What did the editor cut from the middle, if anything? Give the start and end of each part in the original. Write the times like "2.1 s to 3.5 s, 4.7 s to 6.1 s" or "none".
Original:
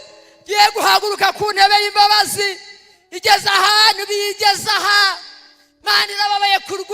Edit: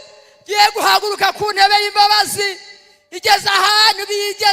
none

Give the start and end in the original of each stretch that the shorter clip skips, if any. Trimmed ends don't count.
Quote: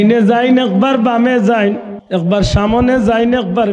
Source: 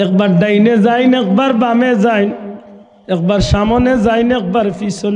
2.5 s to 2.9 s

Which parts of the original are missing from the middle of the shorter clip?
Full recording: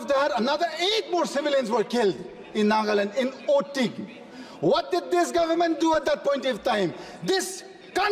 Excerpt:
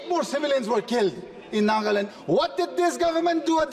3.1 s to 4.4 s

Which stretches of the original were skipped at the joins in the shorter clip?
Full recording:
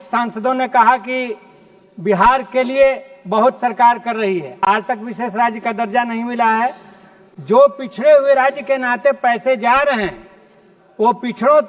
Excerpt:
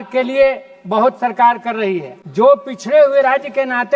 4.5 s to 7.2 s

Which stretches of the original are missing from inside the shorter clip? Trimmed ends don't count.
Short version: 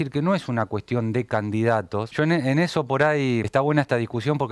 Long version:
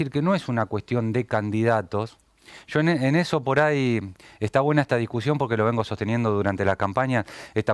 2.1 s to 2.7 s, 4.0 s to 4.5 s

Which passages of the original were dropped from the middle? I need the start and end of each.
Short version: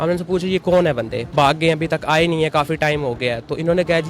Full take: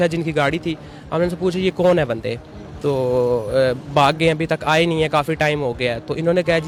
2.4 s to 3.8 s

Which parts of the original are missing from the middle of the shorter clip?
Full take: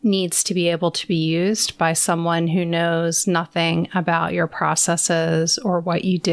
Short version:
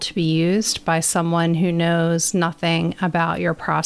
none

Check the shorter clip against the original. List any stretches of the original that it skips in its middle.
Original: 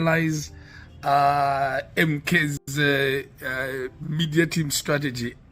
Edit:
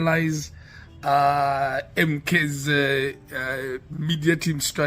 2.6 s to 2.7 s

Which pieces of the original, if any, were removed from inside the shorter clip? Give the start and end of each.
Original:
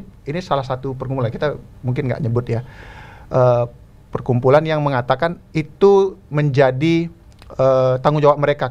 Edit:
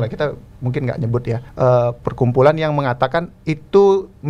2.7 s to 3.2 s, 3.8 s to 4.1 s

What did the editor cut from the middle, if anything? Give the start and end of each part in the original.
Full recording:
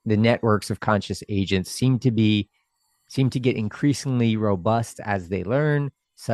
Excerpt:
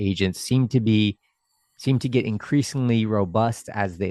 none

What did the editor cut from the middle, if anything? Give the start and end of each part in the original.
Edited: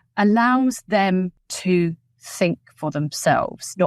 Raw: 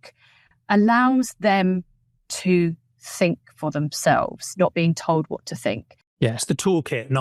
2.0 s to 2.3 s

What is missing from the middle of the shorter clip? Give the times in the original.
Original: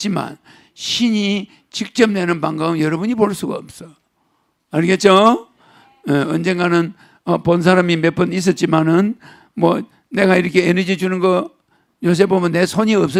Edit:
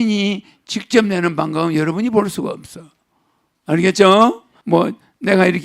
5.6 s to 9.4 s

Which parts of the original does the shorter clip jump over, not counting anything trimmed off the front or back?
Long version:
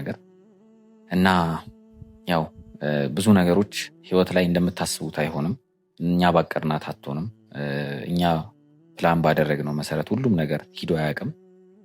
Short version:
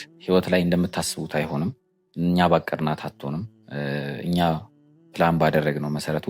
none

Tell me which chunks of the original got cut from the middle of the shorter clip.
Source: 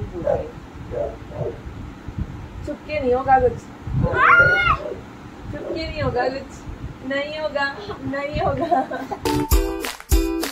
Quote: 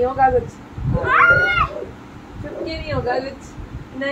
none

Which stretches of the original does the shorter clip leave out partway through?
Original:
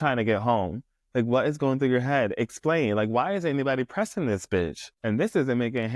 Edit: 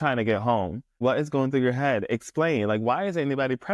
1.0 s to 1.3 s

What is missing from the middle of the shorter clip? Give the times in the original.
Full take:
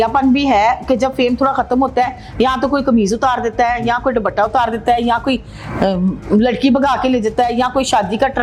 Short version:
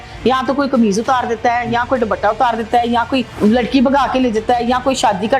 5.5 s to 6.2 s

